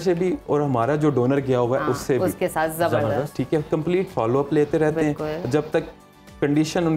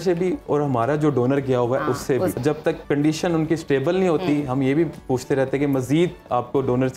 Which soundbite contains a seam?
second; 1 cut; at 2.4 s

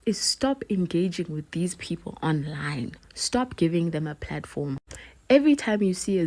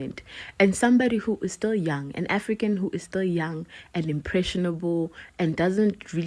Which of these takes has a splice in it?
second; 1 cut; at 1.1 s

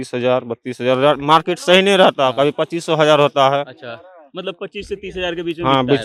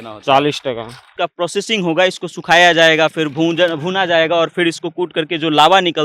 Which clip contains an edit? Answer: second; 1 cut; at 1.1 s

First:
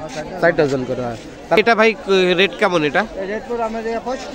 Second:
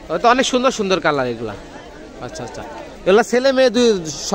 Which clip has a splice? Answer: first; 1 cut; at 1.6 s

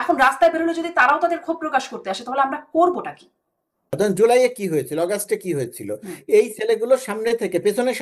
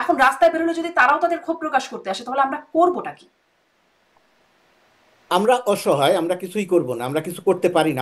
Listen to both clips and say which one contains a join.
first; 1 cut; at 3.9 s

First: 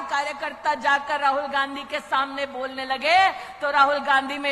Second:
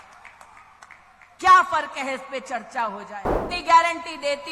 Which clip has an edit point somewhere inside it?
second; 1 cut; at 3.4 s

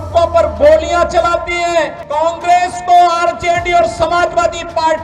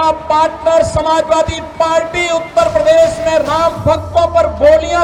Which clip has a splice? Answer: first; 1 cut; at 2.0 s

